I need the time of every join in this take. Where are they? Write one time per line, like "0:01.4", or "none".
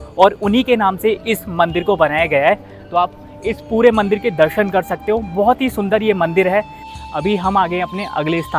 0:06.8